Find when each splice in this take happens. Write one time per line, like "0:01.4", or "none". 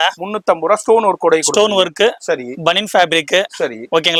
none